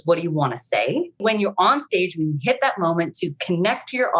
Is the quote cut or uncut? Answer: cut